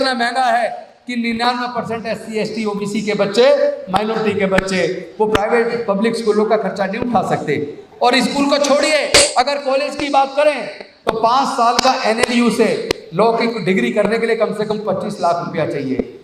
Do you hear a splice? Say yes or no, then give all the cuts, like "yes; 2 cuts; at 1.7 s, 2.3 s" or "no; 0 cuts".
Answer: no; 0 cuts